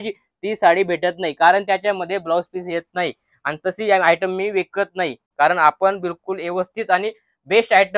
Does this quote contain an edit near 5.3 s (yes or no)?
no